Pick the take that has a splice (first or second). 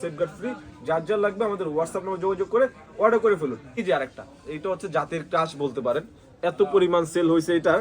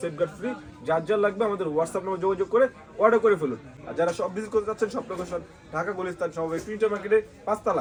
first